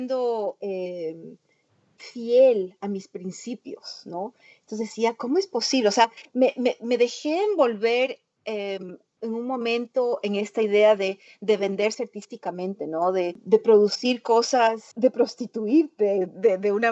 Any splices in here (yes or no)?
yes